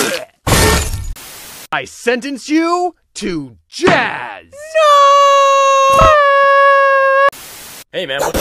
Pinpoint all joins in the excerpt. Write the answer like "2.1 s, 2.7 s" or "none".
1.0 s